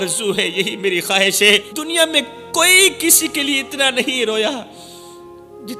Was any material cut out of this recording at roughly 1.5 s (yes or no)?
yes